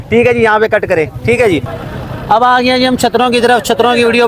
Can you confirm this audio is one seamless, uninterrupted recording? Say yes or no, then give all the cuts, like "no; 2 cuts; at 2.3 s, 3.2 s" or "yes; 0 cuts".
yes; 0 cuts